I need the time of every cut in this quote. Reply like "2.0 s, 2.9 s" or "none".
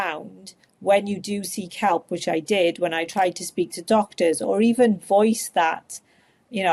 none